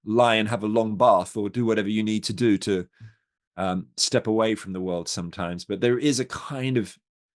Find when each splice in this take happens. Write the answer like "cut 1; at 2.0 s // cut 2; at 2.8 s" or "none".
none